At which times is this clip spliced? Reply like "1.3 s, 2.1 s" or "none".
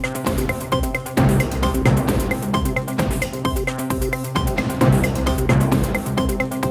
none

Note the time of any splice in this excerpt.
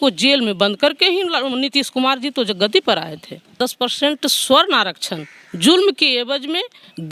3.5 s

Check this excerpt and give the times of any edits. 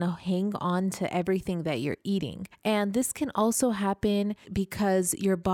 2.4 s, 4.4 s

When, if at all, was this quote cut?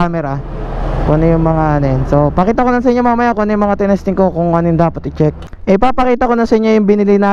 5.5 s

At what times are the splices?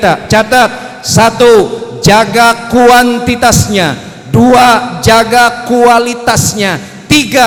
none

